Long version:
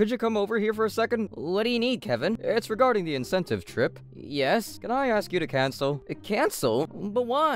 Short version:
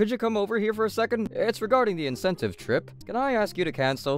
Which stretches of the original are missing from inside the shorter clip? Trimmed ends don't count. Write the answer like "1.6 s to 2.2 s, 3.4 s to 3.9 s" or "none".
1.3 s to 2.4 s, 4.1 s to 4.7 s